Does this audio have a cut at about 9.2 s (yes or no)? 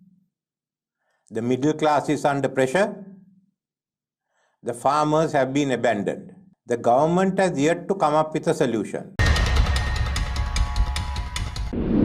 yes